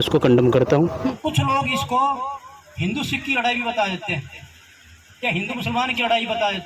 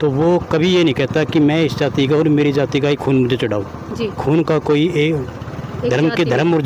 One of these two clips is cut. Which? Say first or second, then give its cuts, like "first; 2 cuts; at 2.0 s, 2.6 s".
first; 1 cut; at 1.1 s